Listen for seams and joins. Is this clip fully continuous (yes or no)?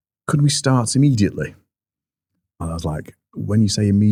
yes